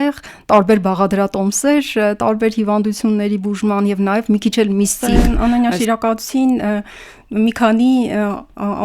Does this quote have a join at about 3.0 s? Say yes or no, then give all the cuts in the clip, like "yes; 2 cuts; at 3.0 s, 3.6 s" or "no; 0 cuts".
no; 1 cut; at 5.0 s